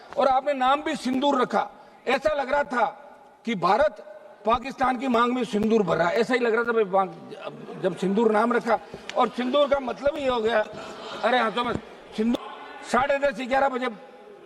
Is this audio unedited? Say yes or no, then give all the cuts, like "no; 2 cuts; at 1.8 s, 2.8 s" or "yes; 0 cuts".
no; 1 cut; at 12.3 s